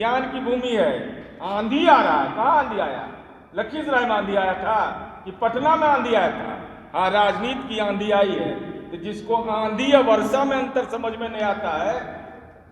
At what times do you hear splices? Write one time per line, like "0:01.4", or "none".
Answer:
none